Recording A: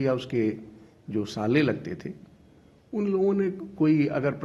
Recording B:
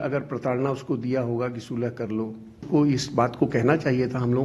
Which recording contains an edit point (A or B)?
B